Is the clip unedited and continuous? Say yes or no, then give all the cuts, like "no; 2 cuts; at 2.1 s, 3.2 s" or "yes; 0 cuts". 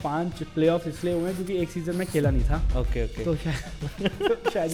yes; 0 cuts